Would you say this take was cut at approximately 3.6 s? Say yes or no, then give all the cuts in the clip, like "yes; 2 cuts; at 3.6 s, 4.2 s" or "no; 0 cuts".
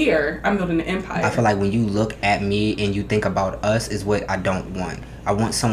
no; 1 cut; at 1.2 s